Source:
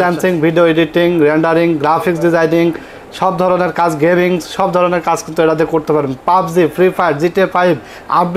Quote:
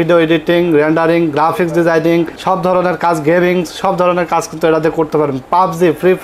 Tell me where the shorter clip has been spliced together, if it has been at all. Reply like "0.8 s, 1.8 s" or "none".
2.4 s